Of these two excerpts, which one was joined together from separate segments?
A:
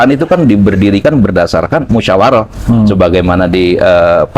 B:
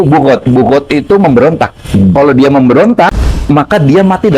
B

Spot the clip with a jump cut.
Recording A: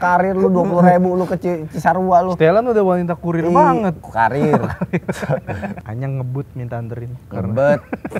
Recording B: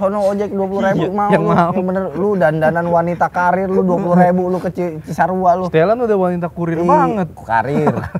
A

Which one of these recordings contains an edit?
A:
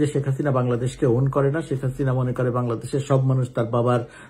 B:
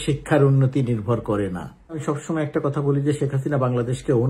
B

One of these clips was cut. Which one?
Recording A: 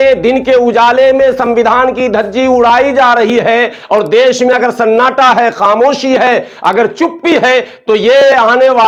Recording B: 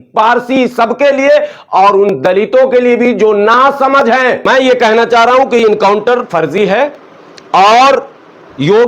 B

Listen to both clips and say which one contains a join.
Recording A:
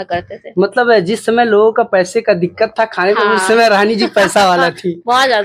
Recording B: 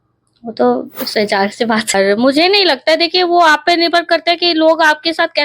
B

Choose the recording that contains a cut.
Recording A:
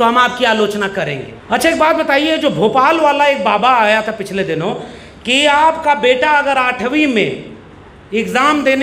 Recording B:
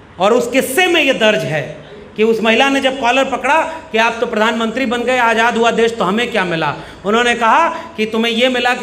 A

